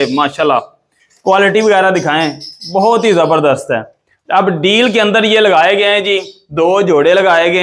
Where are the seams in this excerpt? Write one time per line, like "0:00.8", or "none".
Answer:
none